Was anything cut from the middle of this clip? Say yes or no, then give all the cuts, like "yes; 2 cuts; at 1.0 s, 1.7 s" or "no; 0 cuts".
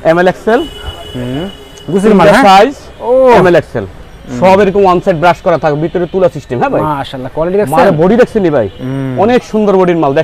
no; 0 cuts